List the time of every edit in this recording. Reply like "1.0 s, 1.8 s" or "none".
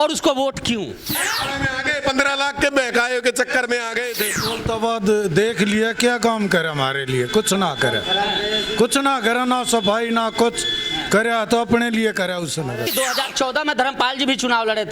1.2 s, 4.3 s, 12.9 s

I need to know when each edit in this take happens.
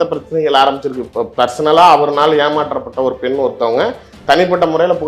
1.0 s

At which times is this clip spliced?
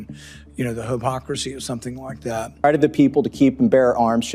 2.6 s

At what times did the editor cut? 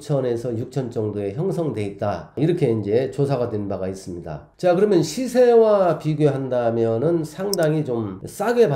none

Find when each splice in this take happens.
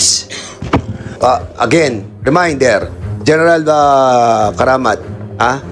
1.2 s

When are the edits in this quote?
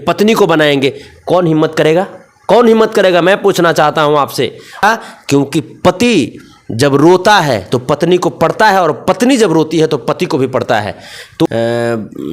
4.8 s, 11.5 s

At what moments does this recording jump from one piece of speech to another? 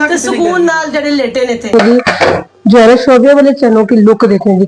1.7 s

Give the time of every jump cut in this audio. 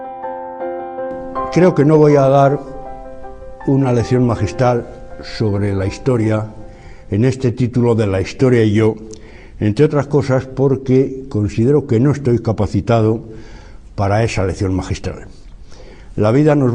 12.5 s

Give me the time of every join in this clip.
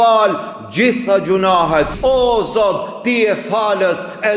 1.9 s

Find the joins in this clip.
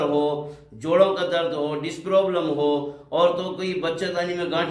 none

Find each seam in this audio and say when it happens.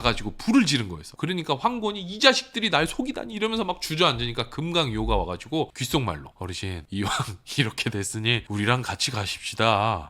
1.0 s

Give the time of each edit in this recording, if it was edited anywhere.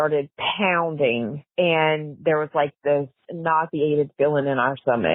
3.3 s

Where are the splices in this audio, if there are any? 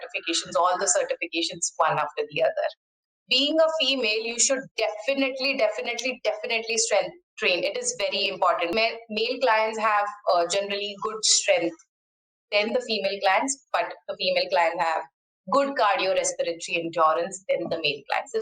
2.9 s, 8.7 s

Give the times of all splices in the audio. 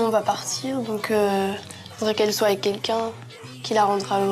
none

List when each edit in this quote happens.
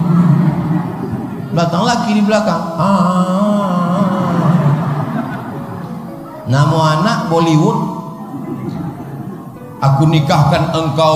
none

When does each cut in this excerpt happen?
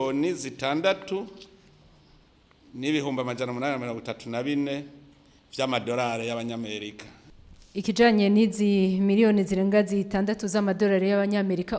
7.5 s

